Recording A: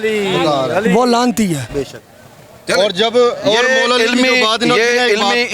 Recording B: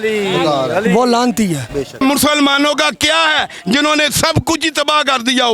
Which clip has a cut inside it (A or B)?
B